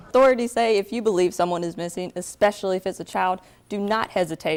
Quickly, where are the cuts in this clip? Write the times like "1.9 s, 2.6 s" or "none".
none